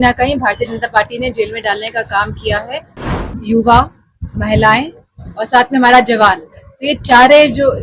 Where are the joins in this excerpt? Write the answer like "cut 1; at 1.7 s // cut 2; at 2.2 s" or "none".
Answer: cut 1; at 3.0 s